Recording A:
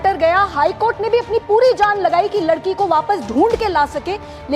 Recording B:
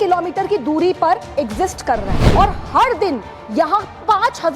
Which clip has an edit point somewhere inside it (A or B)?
B